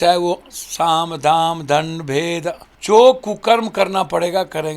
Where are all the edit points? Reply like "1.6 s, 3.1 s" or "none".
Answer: 2.7 s